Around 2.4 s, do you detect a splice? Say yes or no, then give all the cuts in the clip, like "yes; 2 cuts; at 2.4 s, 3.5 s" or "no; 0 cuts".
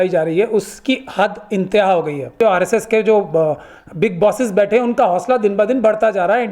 yes; 1 cut; at 2.4 s